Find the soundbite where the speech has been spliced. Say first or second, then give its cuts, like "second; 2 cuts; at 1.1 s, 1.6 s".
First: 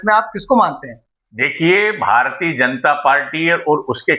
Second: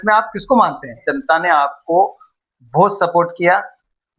second; 1 cut; at 1.1 s